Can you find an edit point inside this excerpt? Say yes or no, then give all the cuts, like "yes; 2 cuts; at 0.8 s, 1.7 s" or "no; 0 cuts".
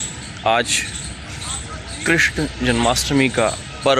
no; 0 cuts